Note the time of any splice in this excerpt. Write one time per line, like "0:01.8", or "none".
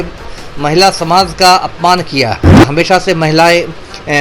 0:02.5